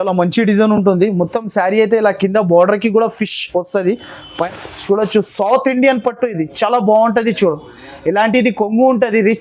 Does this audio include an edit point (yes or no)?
yes